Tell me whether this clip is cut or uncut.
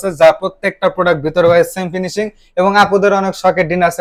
uncut